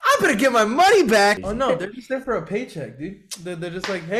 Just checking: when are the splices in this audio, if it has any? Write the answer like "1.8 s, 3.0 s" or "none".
1.4 s